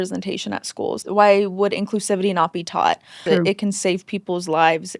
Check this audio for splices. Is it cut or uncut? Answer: cut